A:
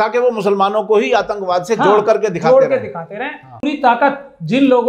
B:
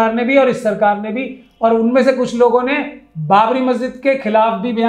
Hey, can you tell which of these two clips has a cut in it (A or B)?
A